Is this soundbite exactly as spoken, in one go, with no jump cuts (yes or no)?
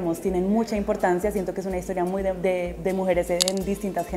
yes